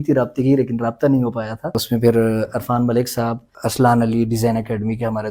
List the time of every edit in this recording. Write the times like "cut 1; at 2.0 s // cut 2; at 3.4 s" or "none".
cut 1; at 1.8 s // cut 2; at 3.5 s